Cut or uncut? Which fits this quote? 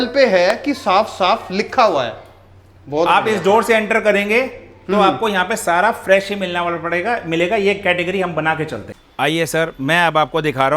uncut